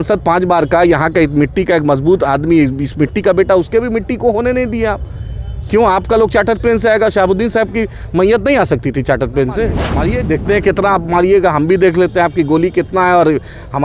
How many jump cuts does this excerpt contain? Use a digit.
1